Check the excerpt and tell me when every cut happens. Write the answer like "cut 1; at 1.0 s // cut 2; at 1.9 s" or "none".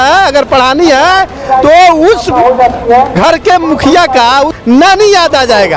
cut 1; at 4.6 s